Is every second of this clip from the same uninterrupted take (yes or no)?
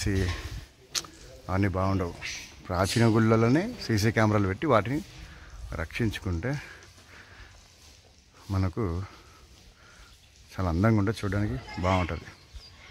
yes